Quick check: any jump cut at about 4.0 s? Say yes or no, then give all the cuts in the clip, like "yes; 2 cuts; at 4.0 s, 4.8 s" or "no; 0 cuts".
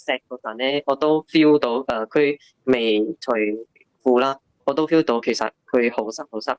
no; 0 cuts